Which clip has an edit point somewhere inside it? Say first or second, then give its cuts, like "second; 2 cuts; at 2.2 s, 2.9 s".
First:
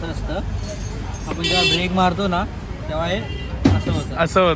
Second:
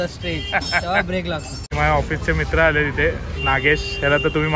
second; 1 cut; at 1.6 s